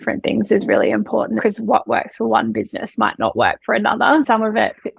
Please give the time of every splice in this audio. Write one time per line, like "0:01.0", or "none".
0:01.4
0:04.3